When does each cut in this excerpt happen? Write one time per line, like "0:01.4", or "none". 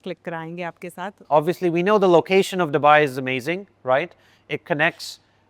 0:01.1